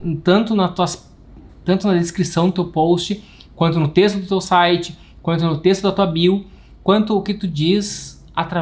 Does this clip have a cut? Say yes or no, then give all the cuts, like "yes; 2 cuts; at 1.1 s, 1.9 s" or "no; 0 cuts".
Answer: no; 0 cuts